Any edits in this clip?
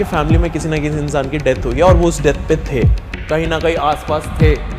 no; 0 cuts

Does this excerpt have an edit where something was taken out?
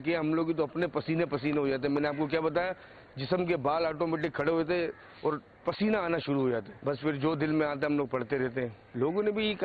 no; 0 cuts

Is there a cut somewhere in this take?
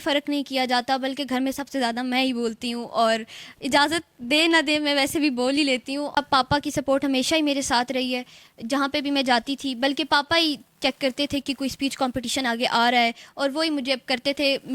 yes; 1 cut; at 6.1 s

